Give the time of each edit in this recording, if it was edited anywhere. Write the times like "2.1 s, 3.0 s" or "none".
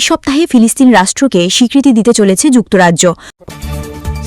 3.3 s